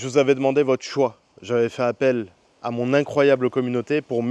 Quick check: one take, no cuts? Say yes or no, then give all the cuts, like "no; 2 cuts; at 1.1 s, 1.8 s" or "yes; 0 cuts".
yes; 0 cuts